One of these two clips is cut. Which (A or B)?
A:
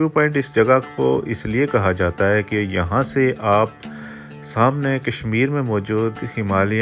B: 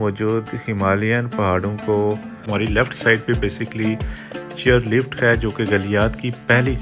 B